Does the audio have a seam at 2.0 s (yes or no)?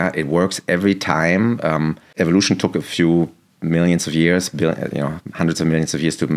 yes